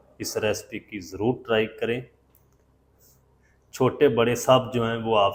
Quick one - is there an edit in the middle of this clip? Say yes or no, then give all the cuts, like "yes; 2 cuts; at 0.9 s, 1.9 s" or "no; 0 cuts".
no; 0 cuts